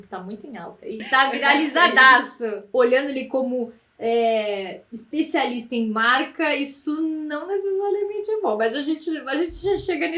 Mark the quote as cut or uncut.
cut